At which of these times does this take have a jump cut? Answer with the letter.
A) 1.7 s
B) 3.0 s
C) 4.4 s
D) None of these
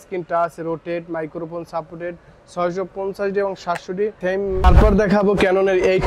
C